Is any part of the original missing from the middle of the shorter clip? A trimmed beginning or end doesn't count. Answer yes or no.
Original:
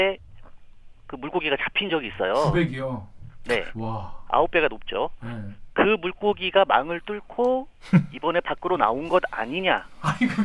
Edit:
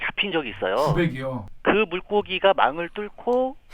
yes